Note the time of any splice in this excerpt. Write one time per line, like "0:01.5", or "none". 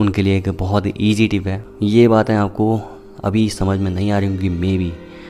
0:01.6